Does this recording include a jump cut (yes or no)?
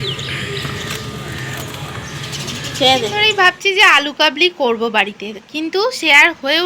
yes